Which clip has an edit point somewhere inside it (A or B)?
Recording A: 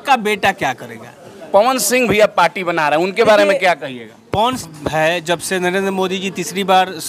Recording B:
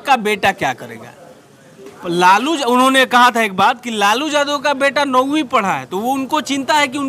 A